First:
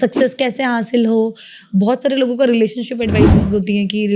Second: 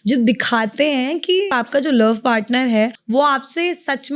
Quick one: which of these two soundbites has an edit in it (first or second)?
second